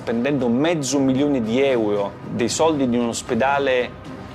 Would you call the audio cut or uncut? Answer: cut